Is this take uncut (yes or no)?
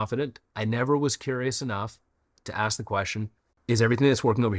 no